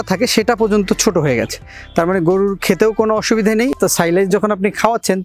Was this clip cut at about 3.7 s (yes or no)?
yes